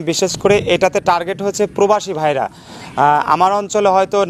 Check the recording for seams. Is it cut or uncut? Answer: uncut